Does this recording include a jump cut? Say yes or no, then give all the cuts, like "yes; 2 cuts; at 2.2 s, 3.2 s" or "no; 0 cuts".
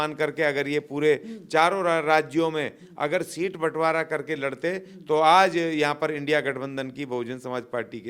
no; 0 cuts